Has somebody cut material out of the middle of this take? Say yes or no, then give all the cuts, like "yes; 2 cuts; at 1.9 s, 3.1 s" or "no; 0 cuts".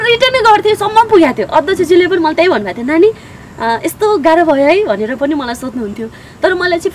no; 0 cuts